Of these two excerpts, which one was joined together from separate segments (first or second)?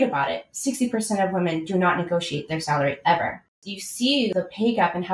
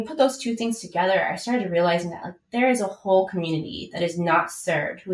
first